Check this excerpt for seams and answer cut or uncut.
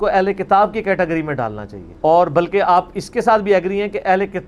uncut